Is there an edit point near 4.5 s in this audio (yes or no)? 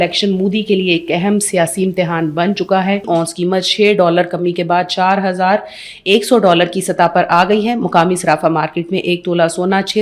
no